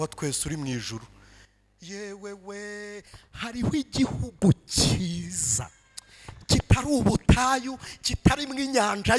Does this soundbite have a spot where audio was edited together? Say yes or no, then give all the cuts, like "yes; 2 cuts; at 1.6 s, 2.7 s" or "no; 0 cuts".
no; 0 cuts